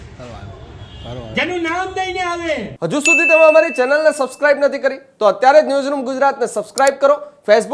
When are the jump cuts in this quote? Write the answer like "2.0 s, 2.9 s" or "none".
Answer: 2.7 s